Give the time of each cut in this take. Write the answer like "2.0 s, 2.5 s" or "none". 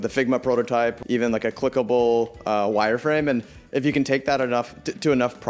1.0 s